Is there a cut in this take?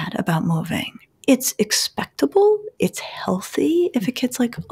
yes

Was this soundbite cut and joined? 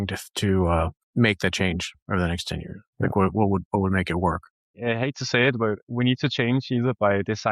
yes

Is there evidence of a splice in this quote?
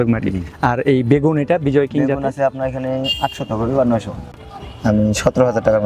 yes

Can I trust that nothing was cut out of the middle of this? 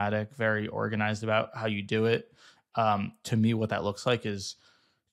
yes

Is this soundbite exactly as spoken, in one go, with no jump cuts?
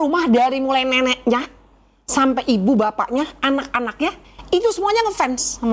no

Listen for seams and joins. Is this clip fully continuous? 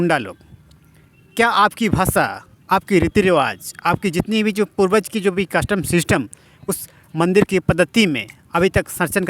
yes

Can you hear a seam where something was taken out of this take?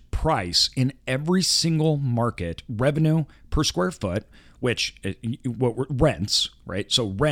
no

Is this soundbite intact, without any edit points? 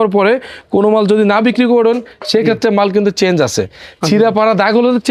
yes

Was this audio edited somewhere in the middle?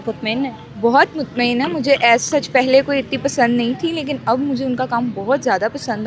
no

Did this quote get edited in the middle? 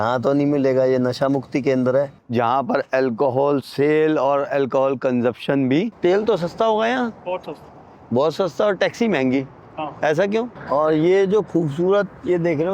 yes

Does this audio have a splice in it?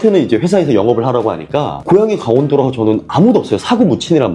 no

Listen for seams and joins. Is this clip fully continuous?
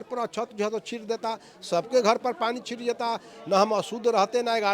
yes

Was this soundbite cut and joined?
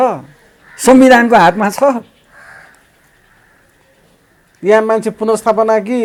no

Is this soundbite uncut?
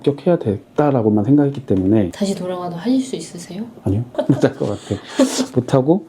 no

